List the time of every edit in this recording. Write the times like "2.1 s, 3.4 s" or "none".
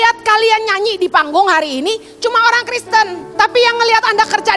3.2 s